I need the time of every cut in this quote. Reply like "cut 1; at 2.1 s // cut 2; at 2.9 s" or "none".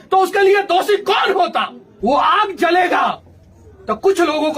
cut 1; at 1.8 s